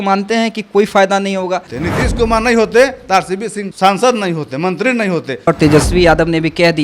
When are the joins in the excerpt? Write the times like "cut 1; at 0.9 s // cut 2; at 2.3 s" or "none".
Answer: cut 1; at 1.8 s // cut 2; at 5.5 s